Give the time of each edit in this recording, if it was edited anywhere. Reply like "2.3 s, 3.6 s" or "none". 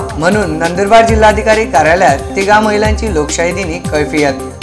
none